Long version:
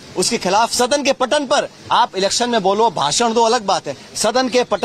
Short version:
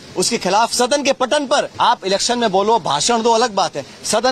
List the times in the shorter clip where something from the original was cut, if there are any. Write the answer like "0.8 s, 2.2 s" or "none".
1.6 s